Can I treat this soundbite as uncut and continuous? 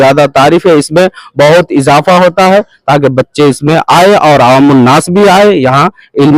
yes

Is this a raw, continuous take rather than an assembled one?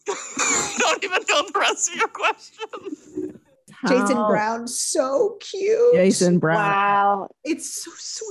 no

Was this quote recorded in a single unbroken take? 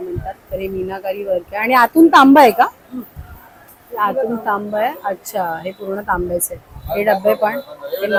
yes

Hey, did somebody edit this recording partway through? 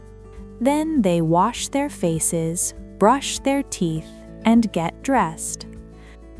yes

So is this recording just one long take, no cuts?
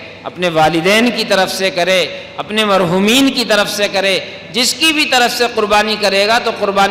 yes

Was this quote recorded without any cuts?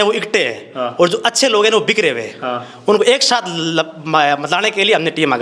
yes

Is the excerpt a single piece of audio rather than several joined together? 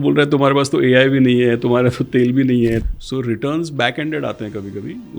no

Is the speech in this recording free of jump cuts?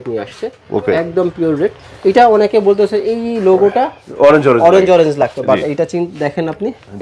yes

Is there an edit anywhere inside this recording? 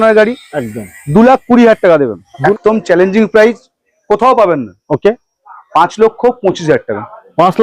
yes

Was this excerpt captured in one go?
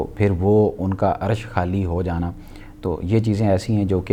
yes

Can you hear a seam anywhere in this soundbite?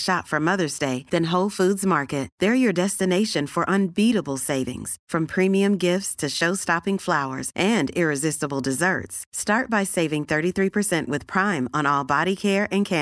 no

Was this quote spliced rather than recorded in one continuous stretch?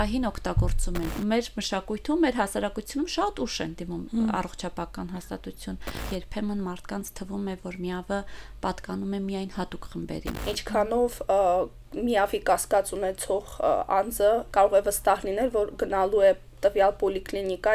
yes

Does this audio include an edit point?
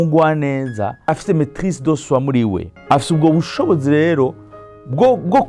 yes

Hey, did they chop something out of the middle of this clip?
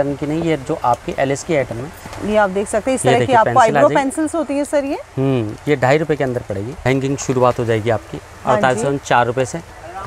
yes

